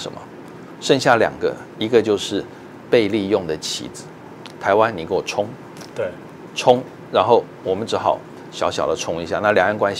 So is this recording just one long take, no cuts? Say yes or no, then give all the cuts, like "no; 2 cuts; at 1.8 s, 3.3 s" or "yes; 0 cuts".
yes; 0 cuts